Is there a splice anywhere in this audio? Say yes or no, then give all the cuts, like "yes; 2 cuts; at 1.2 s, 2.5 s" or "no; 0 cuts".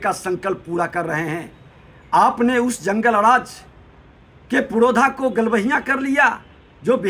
no; 0 cuts